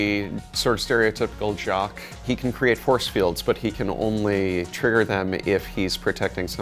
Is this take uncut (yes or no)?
yes